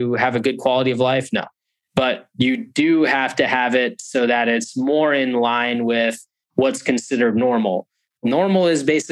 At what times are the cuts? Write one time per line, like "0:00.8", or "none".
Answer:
0:08.2